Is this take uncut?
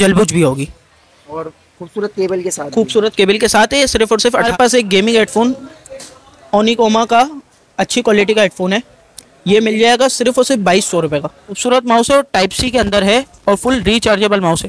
no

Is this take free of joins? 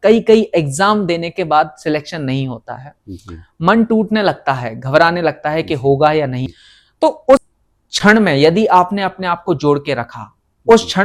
yes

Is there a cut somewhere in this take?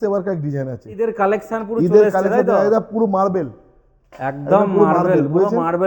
yes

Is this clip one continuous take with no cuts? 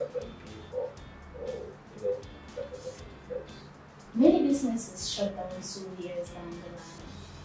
no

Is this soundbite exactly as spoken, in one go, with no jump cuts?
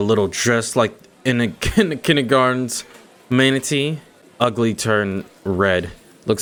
yes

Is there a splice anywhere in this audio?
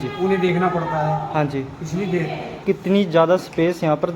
yes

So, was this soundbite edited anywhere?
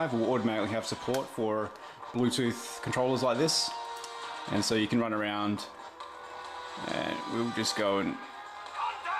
no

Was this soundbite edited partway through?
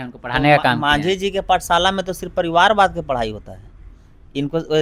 no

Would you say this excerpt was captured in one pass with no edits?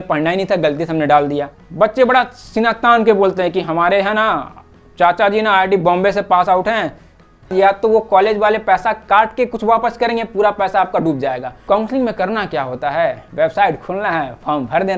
no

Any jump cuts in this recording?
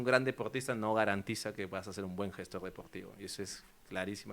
no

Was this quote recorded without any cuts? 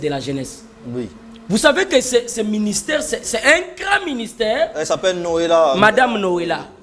yes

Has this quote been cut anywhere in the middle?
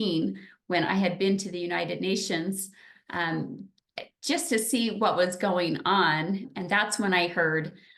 yes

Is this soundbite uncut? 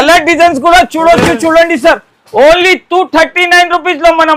yes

